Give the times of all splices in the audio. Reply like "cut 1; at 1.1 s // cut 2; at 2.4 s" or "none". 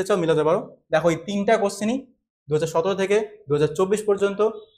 none